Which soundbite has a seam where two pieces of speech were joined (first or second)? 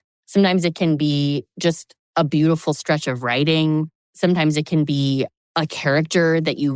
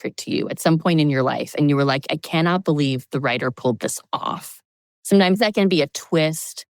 first